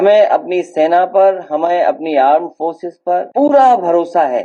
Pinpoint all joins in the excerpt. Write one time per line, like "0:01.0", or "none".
0:03.3